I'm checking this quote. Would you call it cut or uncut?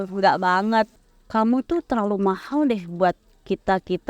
cut